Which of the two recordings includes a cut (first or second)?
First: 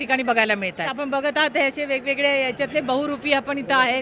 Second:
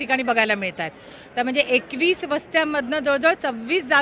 first